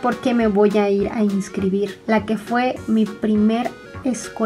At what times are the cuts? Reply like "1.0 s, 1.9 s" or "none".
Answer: 2.0 s